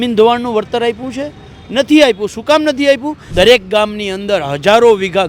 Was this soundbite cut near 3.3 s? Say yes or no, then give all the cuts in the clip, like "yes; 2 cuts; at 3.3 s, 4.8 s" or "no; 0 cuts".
yes; 1 cut; at 3.3 s